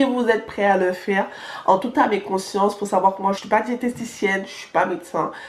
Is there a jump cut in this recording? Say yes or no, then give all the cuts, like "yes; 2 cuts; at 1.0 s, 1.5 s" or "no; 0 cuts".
yes; 1 cut; at 3.4 s